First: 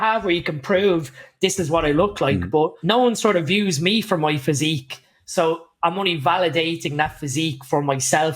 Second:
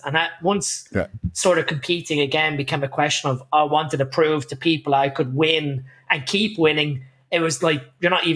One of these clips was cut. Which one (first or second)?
first